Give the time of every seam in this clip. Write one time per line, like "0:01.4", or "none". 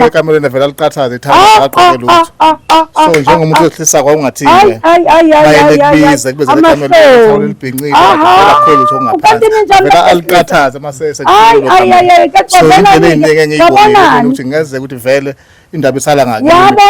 none

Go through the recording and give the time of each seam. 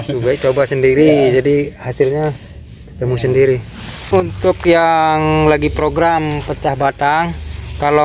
0:03.9

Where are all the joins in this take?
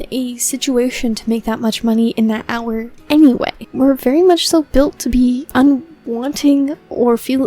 0:02.9
0:03.6
0:05.5

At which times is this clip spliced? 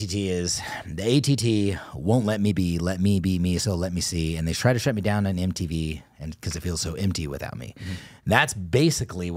none

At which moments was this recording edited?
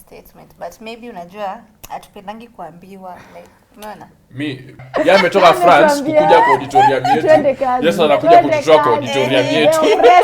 0:04.8

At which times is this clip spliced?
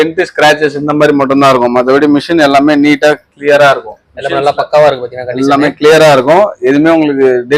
none

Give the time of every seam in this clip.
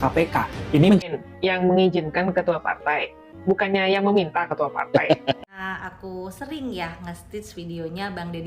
0:00.9
0:05.5

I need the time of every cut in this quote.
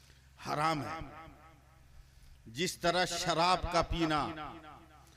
none

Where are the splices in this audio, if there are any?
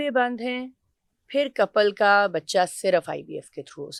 none

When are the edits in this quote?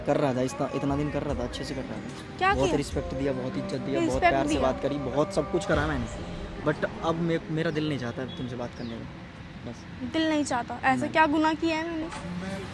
none

